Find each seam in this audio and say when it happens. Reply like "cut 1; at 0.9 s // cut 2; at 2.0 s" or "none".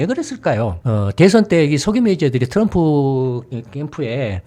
none